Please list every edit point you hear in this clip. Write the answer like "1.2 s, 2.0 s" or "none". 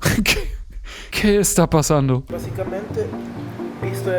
2.3 s